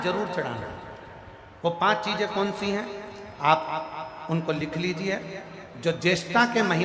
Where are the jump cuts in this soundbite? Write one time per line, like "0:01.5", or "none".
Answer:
none